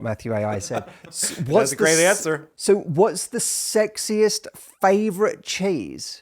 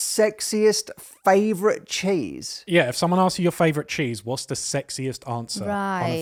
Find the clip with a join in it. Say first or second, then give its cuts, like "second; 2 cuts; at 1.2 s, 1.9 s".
first; 1 cut; at 2.5 s